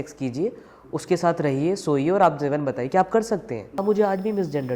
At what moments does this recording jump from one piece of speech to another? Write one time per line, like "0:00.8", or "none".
0:03.8